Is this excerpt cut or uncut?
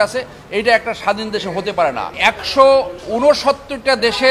cut